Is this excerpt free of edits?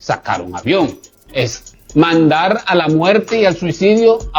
yes; 0 cuts

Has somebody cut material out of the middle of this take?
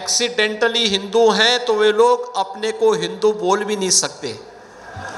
no; 0 cuts

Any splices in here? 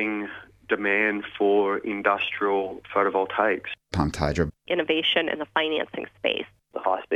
no; 0 cuts

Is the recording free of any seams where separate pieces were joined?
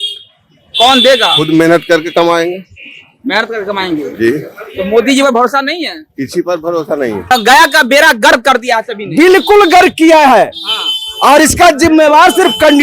no; 1 cut; at 7.3 s

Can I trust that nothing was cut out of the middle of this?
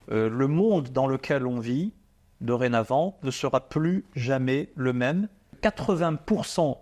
no; 1 cut; at 5.5 s

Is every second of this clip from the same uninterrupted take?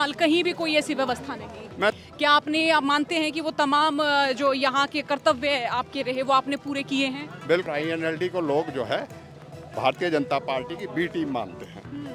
no; 2 cuts; at 1.9 s, 7.7 s

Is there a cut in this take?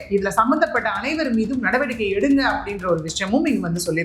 no; 0 cuts

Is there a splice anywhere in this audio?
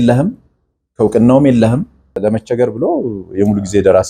yes; 1 cut; at 2.2 s

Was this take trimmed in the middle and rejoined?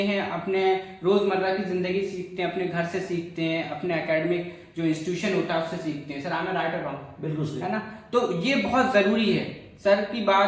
no; 0 cuts

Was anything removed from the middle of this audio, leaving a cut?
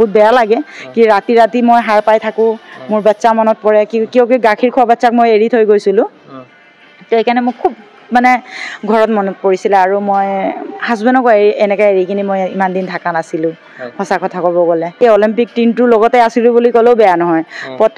yes; 1 cut; at 15.0 s

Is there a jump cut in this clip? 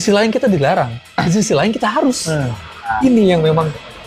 yes; 2 cuts; at 1.0 s, 2.9 s

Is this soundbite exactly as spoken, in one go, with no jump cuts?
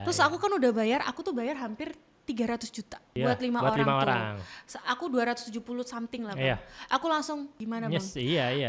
no; 2 cuts; at 3.0 s, 7.5 s

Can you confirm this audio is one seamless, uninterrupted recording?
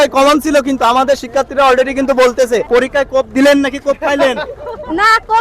no; 1 cut; at 2.6 s

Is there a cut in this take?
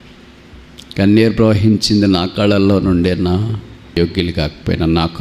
yes; 1 cut; at 4.0 s

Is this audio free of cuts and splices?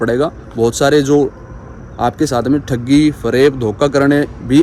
yes; 0 cuts

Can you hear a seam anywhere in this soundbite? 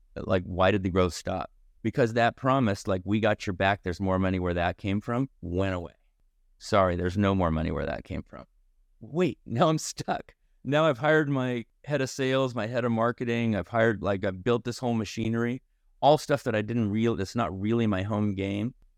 no; 0 cuts

